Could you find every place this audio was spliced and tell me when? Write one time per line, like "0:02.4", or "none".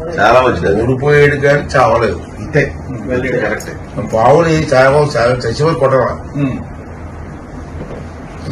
none